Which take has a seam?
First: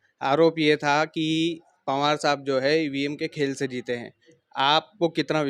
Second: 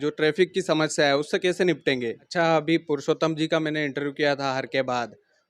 second; 1 cut; at 2.2 s

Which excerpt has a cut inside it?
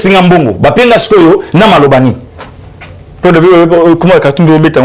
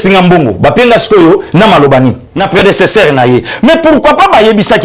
second; 1 cut; at 2.3 s

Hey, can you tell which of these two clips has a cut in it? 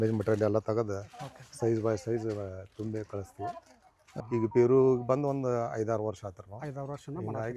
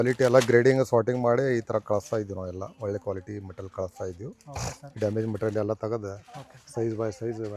first; 1 cut; at 4.1 s

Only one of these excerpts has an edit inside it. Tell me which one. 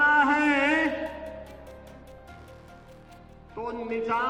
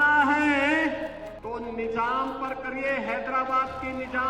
second; 1 cut; at 1.3 s

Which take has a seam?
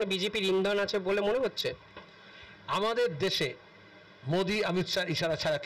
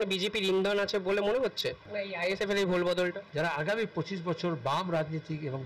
second; 2 cuts; at 2.3 s, 3.2 s

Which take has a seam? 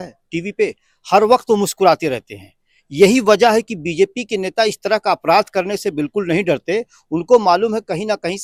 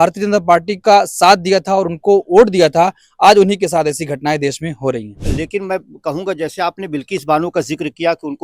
second; 1 cut; at 5.2 s

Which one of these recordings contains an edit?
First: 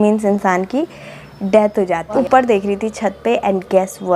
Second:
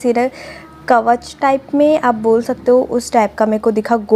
first; 1 cut; at 2.1 s

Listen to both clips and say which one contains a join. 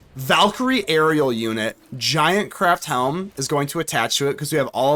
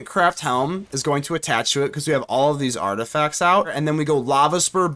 second; 1 cut; at 3.7 s

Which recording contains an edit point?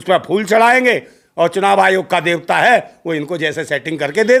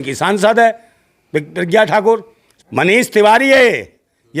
second; 1 cut; at 2.4 s

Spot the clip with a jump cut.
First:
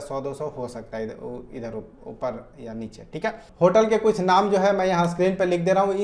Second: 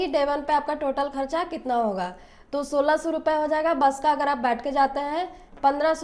first; 1 cut; at 3.4 s

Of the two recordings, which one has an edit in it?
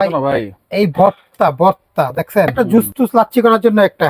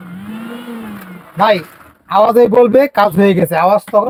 first; 1 cut; at 2.7 s

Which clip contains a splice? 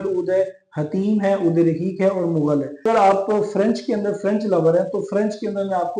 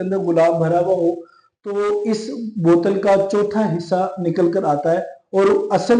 first; 1 cut; at 2.9 s

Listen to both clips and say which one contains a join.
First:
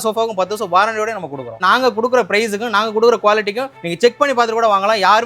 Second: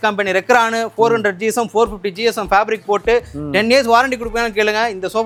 first; 1 cut; at 1.6 s

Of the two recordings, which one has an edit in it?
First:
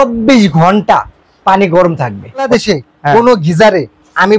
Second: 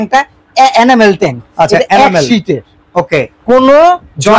first; 1 cut; at 2.5 s

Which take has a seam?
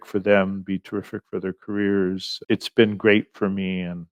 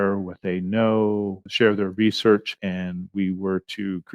second; 2 cuts; at 1.4 s, 2.5 s

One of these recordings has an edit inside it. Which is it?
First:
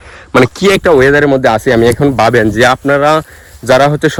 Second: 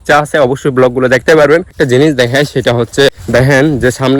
second; 2 cuts; at 1.7 s, 3.1 s

